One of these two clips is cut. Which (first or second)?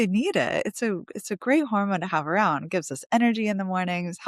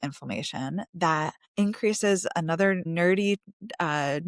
second